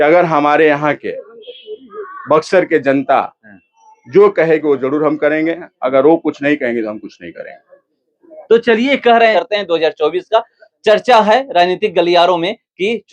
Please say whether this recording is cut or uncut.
cut